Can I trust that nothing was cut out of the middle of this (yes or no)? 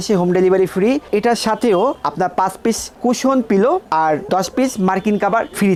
yes